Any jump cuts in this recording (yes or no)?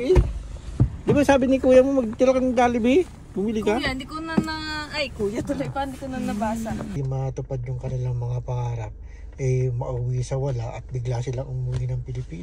yes